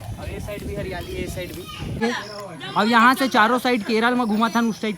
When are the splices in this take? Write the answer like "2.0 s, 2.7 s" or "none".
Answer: 2.0 s